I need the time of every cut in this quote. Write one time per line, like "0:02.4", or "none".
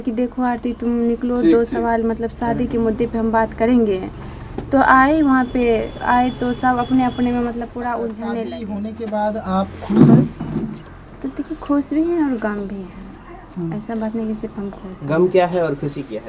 0:08.6

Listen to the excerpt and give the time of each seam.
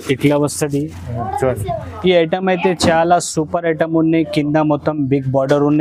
none

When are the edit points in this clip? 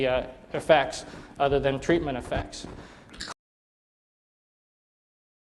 none

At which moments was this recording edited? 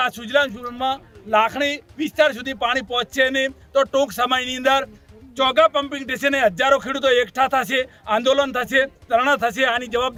none

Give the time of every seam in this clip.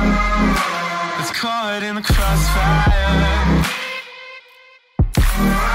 0:01.2

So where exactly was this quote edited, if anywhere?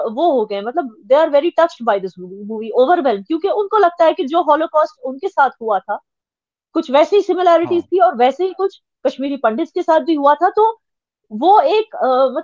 none

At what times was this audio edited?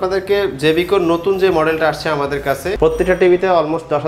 0:02.7

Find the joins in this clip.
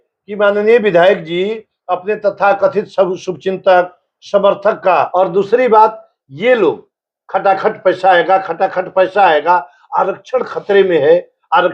0:05.1

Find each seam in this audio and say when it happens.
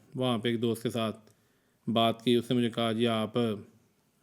none

